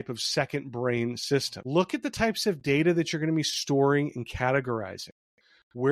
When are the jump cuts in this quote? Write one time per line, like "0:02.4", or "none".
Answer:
0:01.6